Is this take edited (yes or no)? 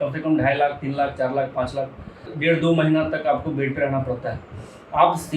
yes